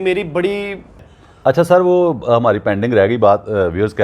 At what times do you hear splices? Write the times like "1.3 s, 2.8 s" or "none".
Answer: 0.9 s